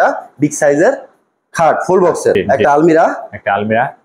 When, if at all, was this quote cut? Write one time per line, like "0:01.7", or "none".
0:02.4